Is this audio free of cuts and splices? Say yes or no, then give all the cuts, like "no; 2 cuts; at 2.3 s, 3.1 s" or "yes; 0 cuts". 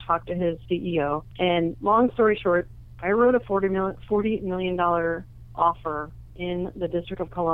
no; 1 cut; at 1.3 s